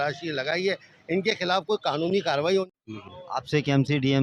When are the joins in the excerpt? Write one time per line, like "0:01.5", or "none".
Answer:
0:02.7